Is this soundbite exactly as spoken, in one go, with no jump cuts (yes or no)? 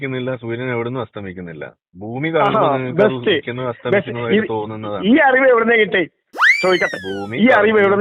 yes